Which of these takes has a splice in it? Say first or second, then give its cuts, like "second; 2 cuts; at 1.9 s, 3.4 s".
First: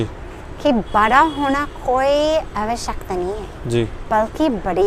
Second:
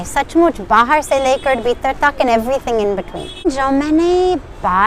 second; 1 cut; at 3.5 s